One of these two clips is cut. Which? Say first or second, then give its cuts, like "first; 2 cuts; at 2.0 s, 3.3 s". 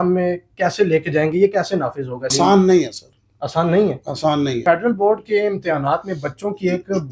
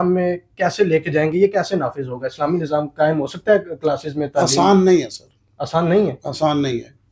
first; 2 cuts; at 2.3 s, 4.6 s